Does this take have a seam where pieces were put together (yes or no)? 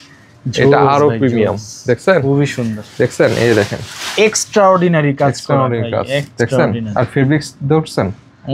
no